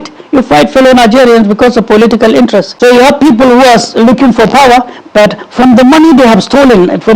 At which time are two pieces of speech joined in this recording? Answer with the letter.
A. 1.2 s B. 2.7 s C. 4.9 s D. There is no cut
B